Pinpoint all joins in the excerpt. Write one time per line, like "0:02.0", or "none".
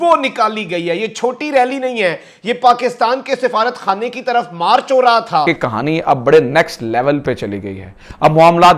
0:05.5